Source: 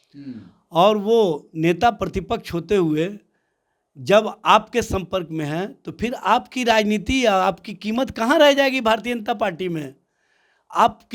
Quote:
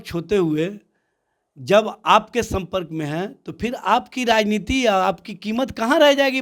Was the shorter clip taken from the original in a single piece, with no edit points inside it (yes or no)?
yes